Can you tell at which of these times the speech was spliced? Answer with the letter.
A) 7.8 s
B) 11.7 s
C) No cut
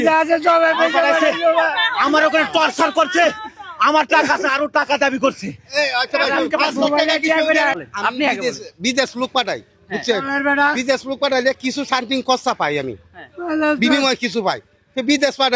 A